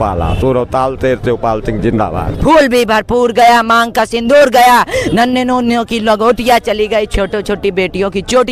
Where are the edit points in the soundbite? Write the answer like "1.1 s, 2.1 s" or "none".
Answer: 2.3 s